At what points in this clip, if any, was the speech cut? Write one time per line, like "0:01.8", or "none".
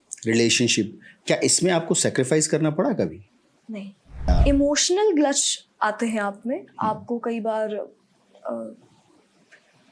0:04.3